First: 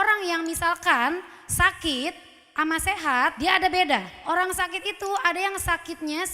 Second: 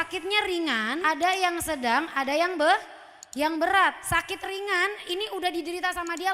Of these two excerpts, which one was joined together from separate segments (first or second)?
first